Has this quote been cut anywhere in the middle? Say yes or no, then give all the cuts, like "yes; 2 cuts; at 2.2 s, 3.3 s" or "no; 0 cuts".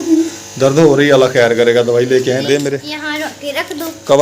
yes; 1 cut; at 2.6 s